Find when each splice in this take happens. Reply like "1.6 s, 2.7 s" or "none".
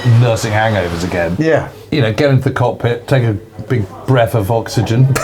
1.8 s, 3.7 s